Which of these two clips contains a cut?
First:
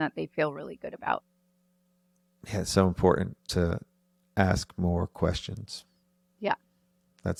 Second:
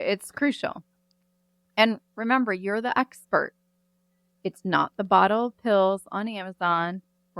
second; 1 cut; at 4.3 s

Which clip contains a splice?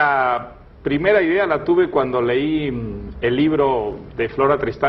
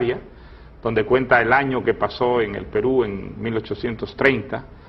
second; 1 cut; at 1.3 s

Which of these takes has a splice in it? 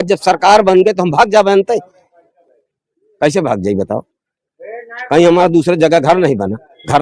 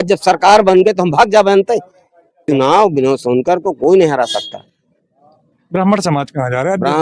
second; 1 cut; at 2.4 s

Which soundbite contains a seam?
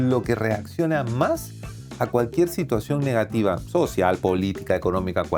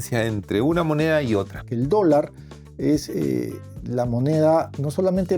second; 1 cut; at 1.7 s

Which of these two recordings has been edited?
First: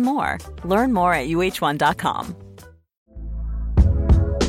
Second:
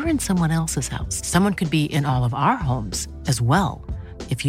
first; 1 cut; at 2.9 s

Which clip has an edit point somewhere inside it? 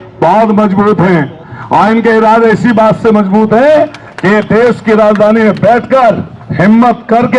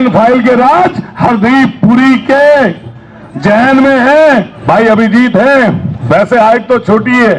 second; 2 cuts; at 4.5 s, 5.9 s

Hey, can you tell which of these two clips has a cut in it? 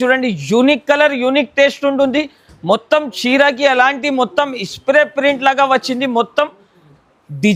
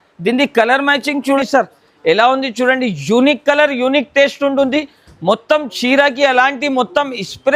second; 1 cut; at 1.4 s

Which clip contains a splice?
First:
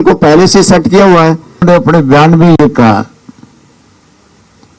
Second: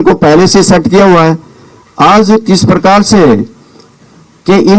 first; 1 cut; at 1.6 s

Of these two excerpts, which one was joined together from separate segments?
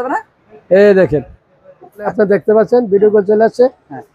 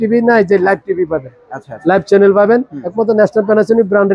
first; 1 cut; at 2.0 s

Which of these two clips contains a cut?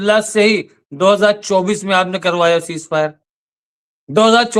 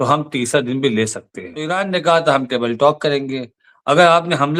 second; 1 cut; at 1.7 s

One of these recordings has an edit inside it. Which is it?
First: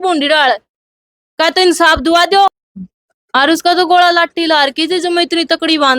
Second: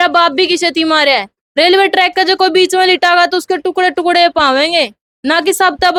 first; 1 cut; at 2.6 s

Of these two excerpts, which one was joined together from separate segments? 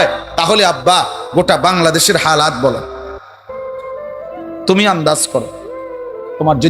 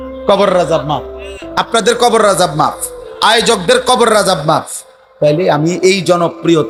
first; 2 cuts; at 3.0 s, 4.6 s

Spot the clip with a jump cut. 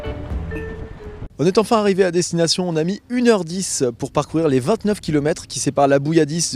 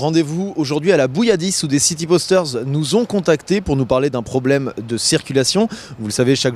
first; 1 cut; at 0.9 s

